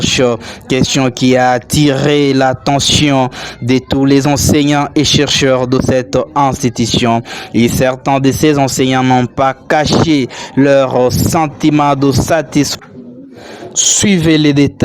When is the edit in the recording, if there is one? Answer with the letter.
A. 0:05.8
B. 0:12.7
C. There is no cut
B